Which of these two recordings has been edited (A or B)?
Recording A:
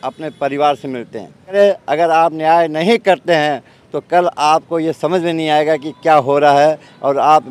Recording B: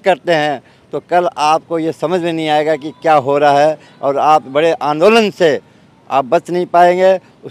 A